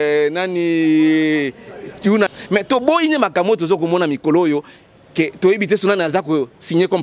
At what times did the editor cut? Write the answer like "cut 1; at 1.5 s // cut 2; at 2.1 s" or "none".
cut 1; at 2.3 s